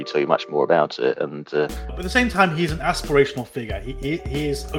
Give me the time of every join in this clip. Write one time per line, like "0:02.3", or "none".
0:01.8